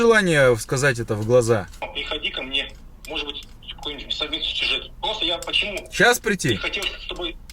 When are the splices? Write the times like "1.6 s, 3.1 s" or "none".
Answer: 1.8 s